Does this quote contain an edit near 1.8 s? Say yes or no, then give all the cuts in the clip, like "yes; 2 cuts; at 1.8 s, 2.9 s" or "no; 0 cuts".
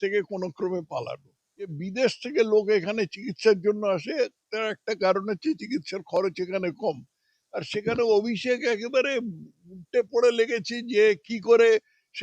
yes; 1 cut; at 1.8 s